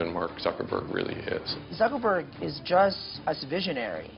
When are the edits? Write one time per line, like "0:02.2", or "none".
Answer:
0:01.5
0:03.1